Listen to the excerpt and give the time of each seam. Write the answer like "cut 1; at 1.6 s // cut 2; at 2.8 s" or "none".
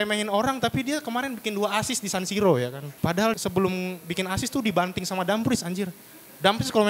cut 1; at 3.1 s